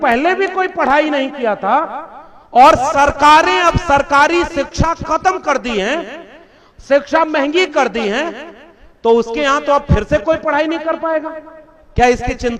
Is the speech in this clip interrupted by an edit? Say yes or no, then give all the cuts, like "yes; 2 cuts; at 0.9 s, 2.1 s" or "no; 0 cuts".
no; 0 cuts